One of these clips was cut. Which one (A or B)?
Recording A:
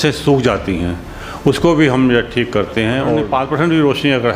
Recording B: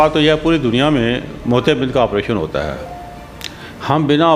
A